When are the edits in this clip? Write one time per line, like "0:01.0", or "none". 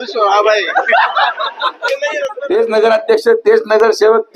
0:02.2